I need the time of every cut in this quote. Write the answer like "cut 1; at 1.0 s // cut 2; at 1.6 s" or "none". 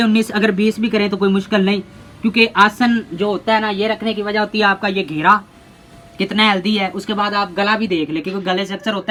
none